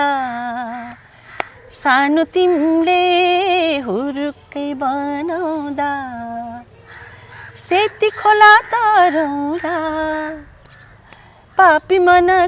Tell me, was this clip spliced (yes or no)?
no